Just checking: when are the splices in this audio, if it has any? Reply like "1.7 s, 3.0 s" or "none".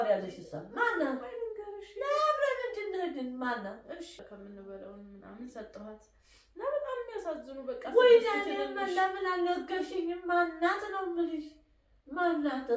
4.2 s